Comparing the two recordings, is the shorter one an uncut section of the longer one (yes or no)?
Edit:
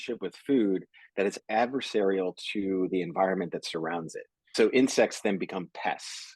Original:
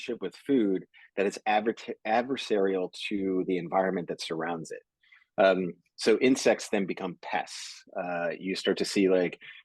no